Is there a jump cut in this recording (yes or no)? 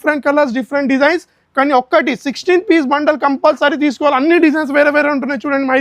no